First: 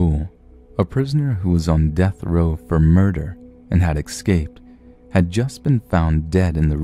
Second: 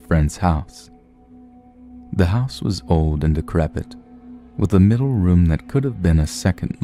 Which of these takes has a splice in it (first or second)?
first